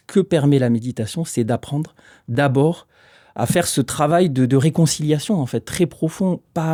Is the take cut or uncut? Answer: uncut